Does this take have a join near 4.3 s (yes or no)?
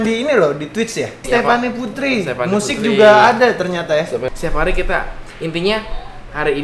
yes